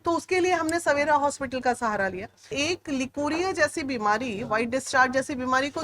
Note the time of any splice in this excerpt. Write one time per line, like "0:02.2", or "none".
0:02.5